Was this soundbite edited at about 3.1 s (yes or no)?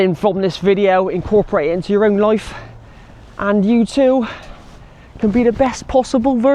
no